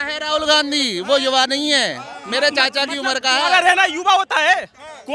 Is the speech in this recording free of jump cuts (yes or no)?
yes